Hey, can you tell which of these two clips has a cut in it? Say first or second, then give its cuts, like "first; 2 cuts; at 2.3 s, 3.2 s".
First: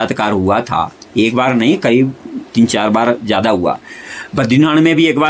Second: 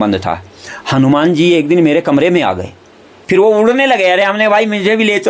second; 1 cut; at 3.1 s